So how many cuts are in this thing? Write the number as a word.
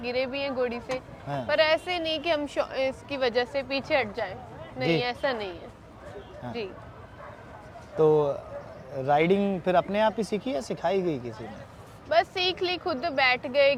zero